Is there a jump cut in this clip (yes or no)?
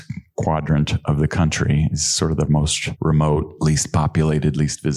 yes